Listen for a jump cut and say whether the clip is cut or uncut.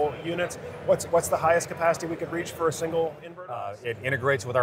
cut